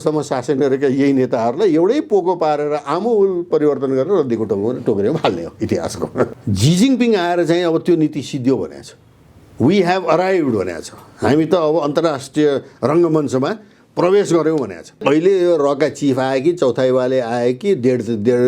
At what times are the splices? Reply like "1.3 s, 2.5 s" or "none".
6.3 s, 15.0 s